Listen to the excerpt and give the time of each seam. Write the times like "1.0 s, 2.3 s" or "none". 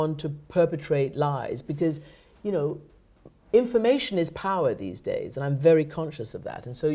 none